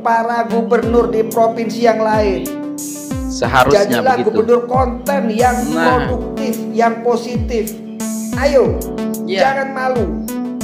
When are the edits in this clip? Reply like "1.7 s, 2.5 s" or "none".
none